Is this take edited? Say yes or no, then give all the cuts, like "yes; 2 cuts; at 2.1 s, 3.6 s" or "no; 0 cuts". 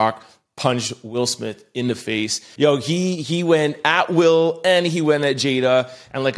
yes; 1 cut; at 2.4 s